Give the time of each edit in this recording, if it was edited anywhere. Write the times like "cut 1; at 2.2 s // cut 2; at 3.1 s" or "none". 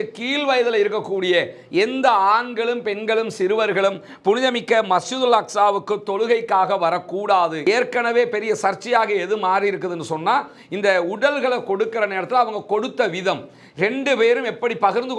cut 1; at 7.6 s